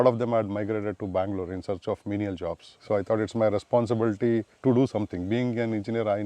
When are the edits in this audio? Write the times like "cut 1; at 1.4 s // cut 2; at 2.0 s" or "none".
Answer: cut 1; at 2.7 s // cut 2; at 4.5 s

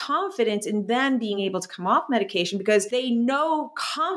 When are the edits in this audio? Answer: cut 1; at 1.4 s // cut 2; at 2.9 s

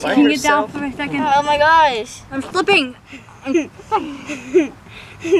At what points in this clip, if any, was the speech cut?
none

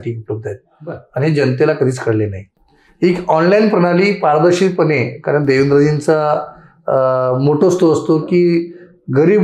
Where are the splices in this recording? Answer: none

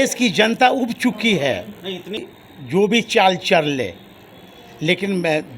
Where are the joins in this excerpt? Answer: cut 1; at 2.2 s

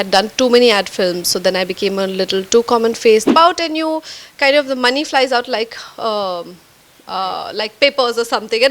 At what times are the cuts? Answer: cut 1; at 3.3 s

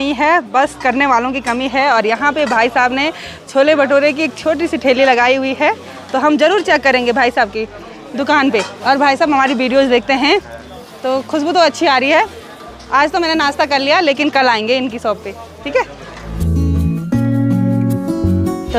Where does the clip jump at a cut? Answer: none

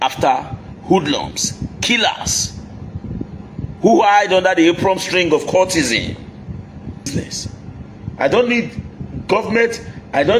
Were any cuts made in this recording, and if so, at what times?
cut 1; at 7.1 s

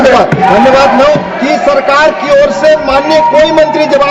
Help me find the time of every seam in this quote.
cut 1; at 1.3 s

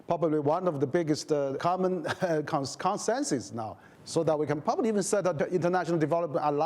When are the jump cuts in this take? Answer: cut 1; at 1.6 s // cut 2; at 5.3 s

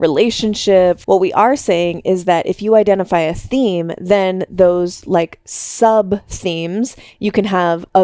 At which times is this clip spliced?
cut 1; at 1.0 s // cut 2; at 7.0 s

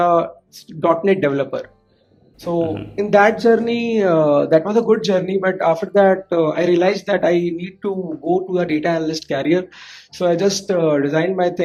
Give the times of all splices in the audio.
none

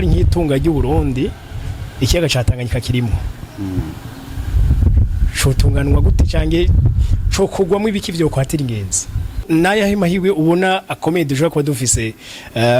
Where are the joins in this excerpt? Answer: cut 1; at 9.4 s

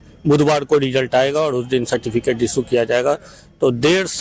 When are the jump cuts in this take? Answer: none

